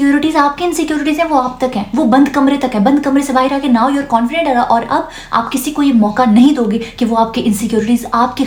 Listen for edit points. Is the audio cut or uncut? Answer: uncut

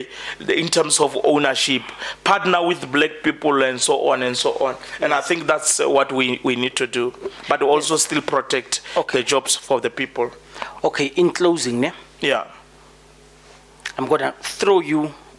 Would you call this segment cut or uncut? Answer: uncut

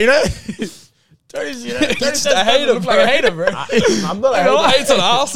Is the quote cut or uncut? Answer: uncut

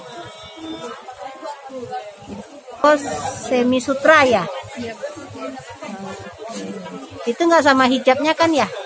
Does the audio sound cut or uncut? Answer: cut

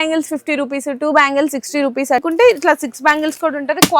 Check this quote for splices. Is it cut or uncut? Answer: cut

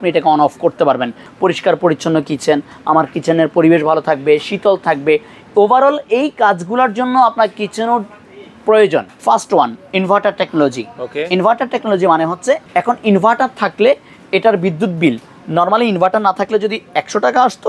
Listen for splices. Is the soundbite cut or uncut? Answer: cut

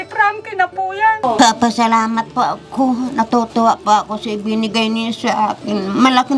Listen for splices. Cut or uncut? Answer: cut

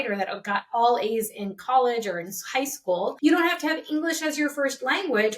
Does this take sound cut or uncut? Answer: cut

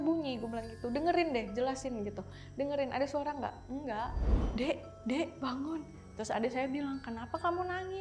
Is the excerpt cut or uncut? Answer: cut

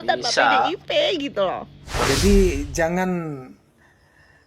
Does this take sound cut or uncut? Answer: cut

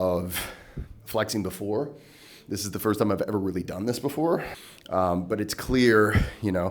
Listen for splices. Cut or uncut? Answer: cut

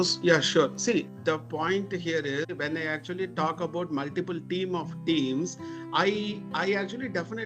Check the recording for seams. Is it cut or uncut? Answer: cut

